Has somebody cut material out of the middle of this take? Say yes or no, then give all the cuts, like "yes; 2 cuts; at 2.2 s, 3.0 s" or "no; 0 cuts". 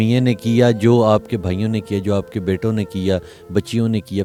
no; 0 cuts